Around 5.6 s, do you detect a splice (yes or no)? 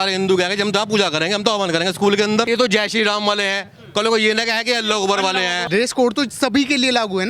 yes